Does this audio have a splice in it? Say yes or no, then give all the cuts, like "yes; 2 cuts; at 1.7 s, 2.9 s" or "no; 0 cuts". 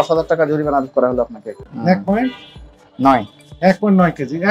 yes; 1 cut; at 1.6 s